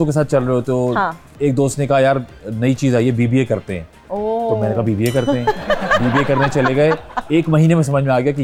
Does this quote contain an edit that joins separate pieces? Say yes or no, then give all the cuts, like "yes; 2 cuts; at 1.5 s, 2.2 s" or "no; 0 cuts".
no; 0 cuts